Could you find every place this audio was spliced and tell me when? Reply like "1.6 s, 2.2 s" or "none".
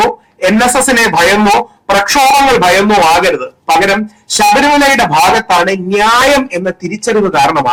none